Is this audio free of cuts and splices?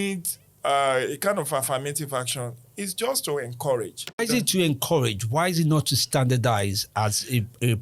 no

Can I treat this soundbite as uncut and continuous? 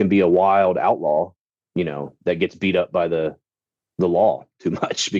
yes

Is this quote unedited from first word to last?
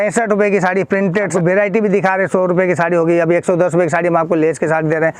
no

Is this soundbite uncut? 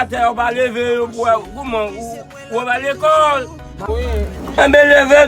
no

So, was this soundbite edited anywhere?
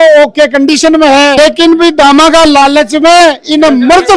yes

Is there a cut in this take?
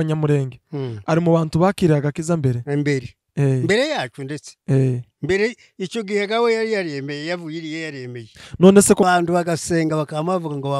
yes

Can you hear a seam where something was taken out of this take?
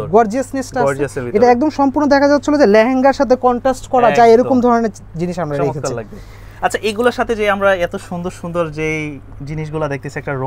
no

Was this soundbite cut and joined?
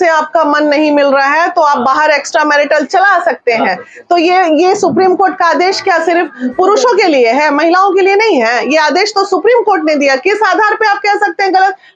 no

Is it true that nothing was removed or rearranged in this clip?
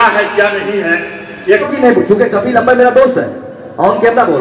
no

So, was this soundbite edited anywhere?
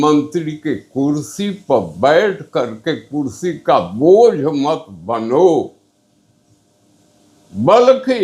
no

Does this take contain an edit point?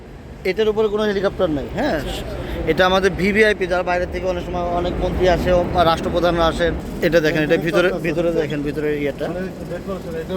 yes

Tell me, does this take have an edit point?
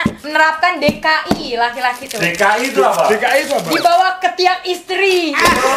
no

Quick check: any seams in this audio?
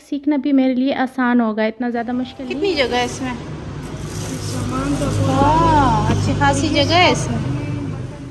yes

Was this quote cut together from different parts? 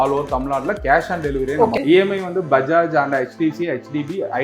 yes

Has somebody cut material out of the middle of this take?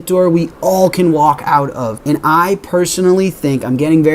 yes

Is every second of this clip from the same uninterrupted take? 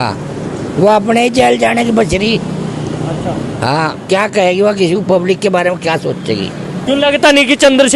no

